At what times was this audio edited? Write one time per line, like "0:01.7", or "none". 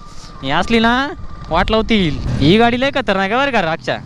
0:02.3